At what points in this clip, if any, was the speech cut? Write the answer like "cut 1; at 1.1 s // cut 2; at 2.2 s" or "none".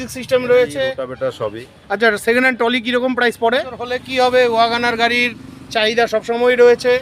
cut 1; at 1.0 s // cut 2; at 4.0 s